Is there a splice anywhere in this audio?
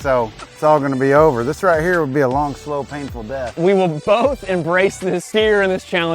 yes; 2 cuts; at 3.8 s, 5.2 s

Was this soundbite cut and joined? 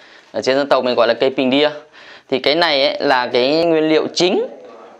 yes; 1 cut; at 3.6 s

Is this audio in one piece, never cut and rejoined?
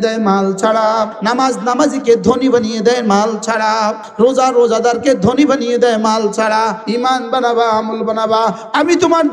no; 3 cuts; at 1.2 s, 4.1 s, 6.8 s

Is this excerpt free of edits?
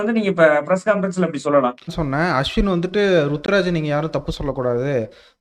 no; 1 cut; at 2.0 s

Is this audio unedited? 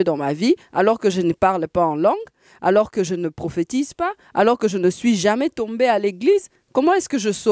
yes; 0 cuts

